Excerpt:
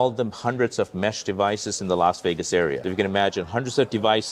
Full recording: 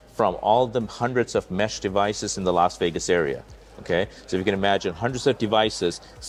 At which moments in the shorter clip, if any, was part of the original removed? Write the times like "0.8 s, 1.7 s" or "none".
2.8 s